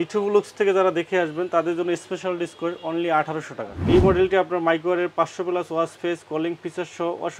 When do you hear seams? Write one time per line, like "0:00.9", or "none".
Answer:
0:03.7